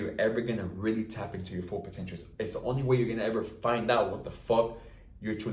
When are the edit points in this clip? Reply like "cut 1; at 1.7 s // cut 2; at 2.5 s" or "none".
none